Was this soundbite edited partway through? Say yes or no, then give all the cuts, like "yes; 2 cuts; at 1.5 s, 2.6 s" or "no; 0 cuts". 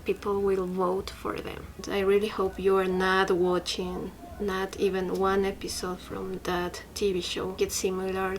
yes; 3 cuts; at 1.8 s, 6.4 s, 7.6 s